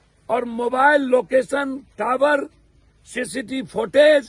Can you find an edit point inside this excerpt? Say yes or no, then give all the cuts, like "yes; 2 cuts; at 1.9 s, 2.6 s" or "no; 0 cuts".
no; 0 cuts